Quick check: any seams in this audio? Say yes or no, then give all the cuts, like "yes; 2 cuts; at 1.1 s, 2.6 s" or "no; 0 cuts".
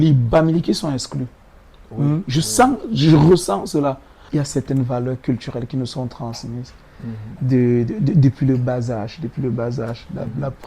yes; 1 cut; at 4.1 s